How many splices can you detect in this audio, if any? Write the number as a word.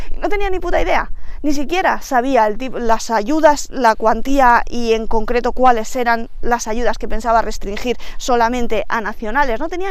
zero